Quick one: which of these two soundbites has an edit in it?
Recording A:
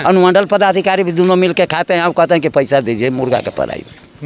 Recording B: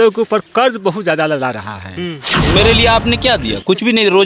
B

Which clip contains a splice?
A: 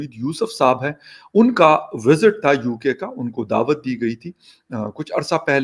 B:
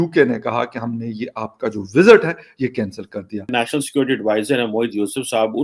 B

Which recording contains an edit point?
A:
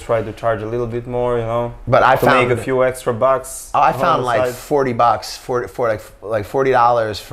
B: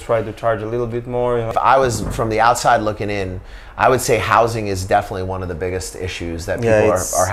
B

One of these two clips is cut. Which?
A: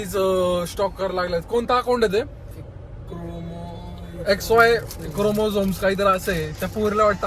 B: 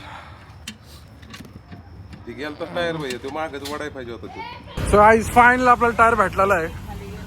B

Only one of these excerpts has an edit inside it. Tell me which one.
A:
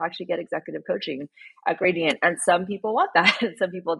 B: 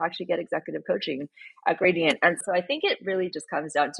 B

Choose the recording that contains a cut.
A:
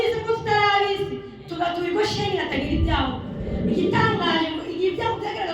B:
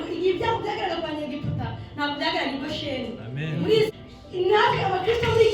B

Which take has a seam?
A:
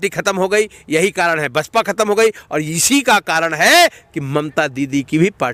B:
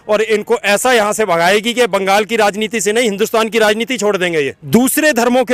B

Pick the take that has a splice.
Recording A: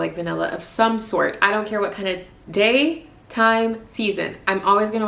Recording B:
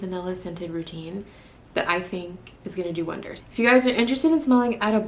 B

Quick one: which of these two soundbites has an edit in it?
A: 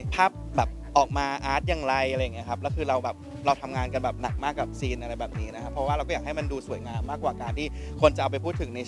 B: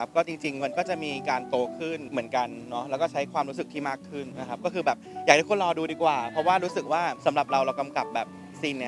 B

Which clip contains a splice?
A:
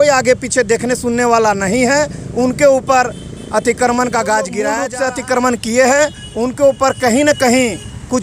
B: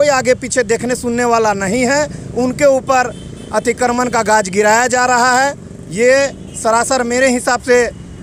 A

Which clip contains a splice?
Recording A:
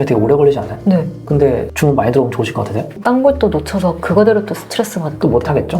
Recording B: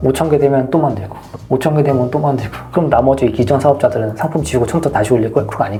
A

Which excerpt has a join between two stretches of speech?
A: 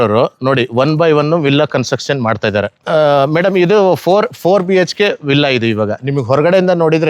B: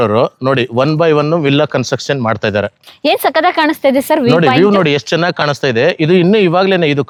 A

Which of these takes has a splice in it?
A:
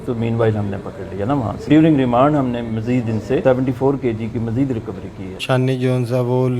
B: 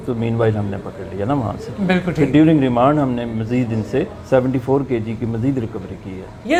A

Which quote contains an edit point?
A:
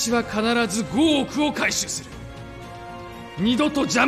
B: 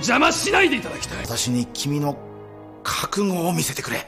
B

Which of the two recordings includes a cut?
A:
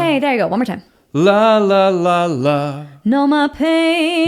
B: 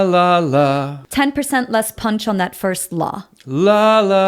B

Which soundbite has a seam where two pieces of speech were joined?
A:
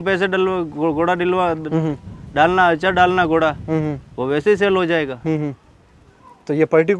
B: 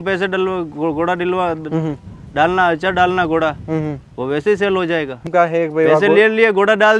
B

